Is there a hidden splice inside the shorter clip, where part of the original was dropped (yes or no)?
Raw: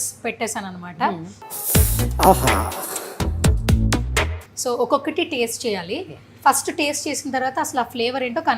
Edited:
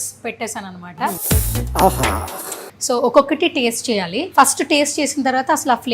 yes